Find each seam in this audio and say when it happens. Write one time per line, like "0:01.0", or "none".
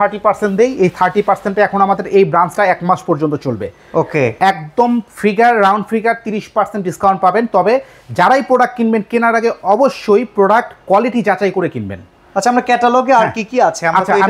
none